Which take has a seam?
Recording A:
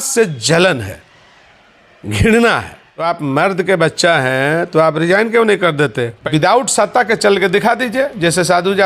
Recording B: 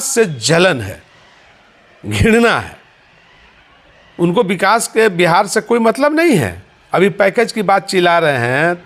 A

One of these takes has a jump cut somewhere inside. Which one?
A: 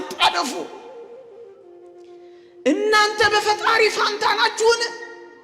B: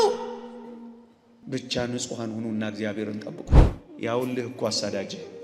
B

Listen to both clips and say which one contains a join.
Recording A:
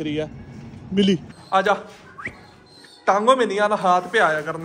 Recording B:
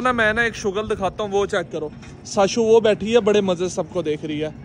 A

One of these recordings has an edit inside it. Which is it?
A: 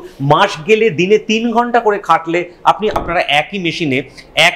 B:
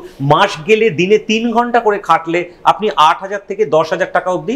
A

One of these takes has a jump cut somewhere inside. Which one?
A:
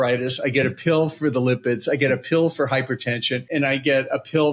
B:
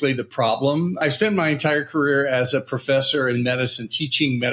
B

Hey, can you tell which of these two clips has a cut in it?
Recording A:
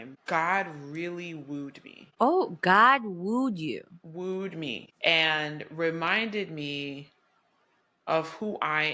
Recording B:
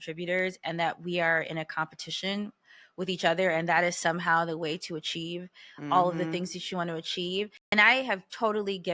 B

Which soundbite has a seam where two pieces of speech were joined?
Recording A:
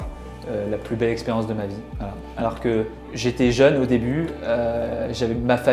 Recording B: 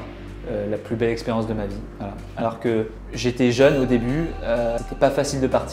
B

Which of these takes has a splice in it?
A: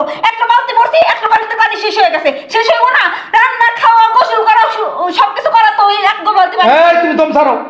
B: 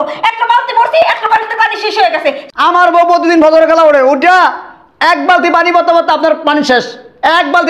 B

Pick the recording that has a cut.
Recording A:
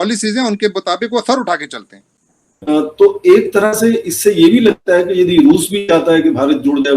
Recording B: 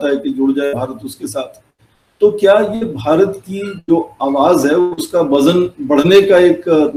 A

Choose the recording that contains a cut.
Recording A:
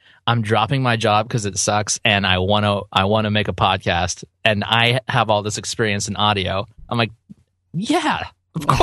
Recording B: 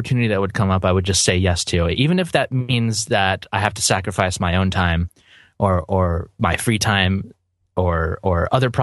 B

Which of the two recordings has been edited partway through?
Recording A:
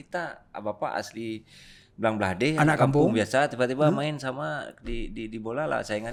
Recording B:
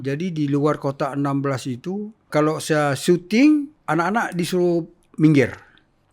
B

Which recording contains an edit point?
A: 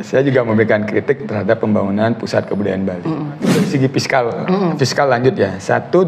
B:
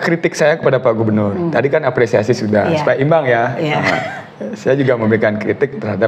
A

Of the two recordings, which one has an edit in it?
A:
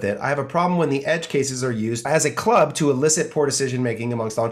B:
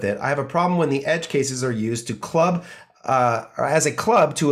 A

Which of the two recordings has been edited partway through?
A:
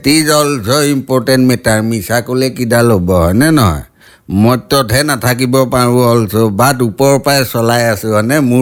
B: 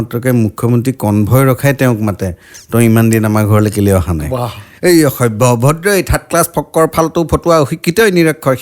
B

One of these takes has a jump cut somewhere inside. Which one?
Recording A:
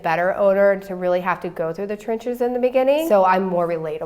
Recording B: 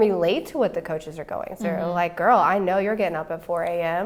A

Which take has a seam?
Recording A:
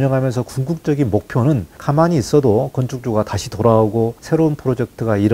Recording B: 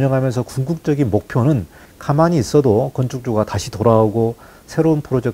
A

